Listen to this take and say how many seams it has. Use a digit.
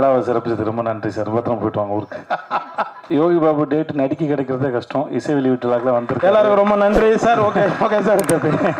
1